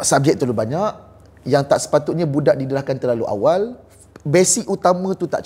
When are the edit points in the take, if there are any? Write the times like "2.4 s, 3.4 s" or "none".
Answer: none